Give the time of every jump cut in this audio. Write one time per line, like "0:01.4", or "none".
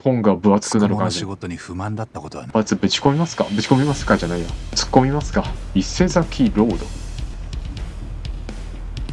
0:02.4
0:05.6
0:07.3

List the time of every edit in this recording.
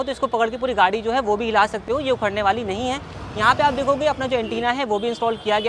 none

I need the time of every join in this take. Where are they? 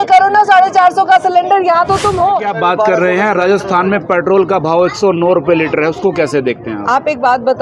0:02.5

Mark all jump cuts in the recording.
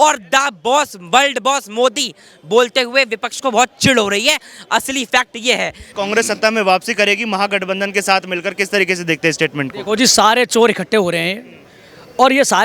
0:05.8

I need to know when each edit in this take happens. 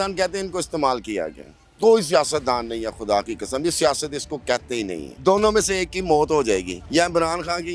0:05.0
0:06.8

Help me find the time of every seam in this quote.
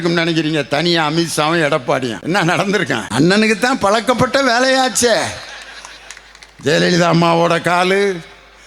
0:02.2
0:03.1

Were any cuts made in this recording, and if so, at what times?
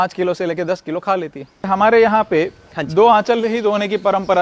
0:01.7

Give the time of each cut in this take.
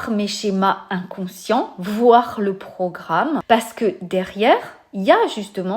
0:03.4

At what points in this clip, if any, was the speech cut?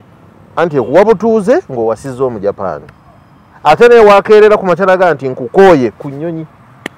none

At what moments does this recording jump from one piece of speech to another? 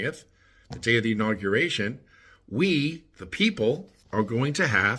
0:03.9

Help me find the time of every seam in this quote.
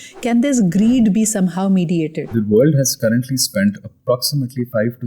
0:02.2

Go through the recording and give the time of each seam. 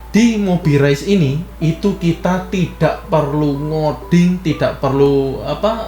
none

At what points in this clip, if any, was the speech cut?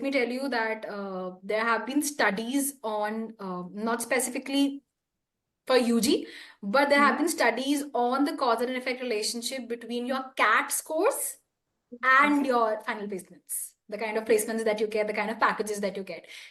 none

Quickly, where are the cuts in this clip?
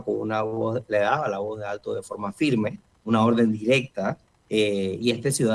0:02.9
0:04.3

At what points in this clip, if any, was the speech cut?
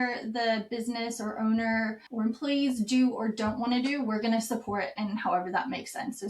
0:02.0

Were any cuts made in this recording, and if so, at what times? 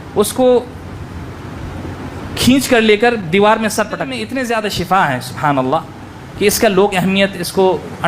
0:04.2

